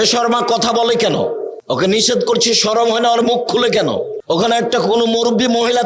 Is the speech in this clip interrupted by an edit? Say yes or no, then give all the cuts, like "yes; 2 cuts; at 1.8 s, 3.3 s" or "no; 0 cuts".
yes; 2 cuts; at 1.5 s, 4.1 s